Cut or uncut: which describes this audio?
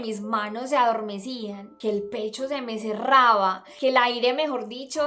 cut